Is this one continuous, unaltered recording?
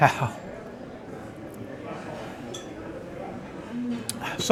yes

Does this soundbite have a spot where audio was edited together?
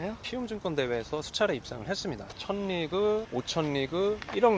yes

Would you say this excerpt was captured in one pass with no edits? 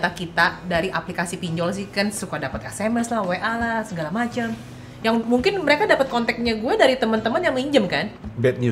yes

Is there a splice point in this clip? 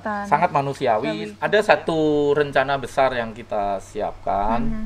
yes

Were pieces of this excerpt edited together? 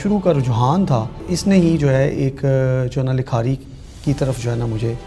yes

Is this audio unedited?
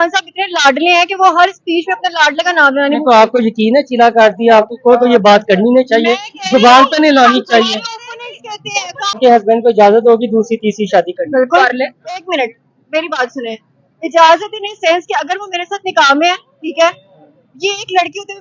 no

